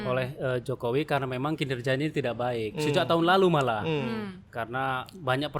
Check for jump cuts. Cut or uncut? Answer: uncut